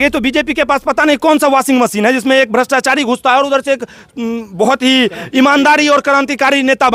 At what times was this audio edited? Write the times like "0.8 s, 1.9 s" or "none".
none